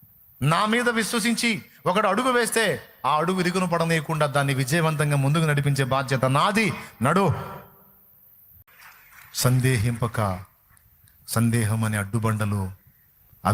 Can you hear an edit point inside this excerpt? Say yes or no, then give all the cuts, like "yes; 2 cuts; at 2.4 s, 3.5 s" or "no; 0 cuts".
yes; 1 cut; at 8.7 s